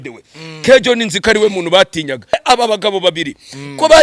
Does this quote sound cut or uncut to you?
cut